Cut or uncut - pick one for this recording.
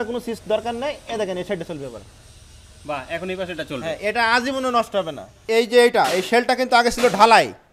cut